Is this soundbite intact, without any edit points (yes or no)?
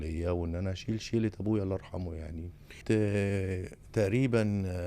no